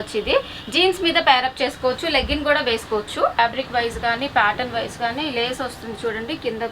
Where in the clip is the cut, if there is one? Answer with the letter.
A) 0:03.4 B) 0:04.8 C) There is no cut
A